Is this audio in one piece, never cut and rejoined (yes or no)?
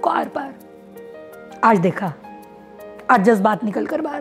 yes